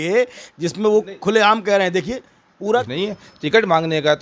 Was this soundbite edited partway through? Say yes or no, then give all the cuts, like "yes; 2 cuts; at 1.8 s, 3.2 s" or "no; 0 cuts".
yes; 1 cut; at 2.8 s